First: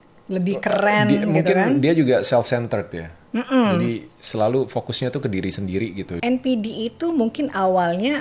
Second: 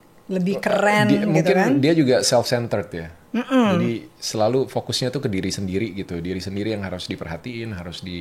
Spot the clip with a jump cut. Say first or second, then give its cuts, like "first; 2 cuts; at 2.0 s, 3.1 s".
first; 1 cut; at 6.3 s